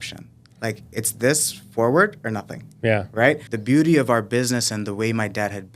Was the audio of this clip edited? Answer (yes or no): yes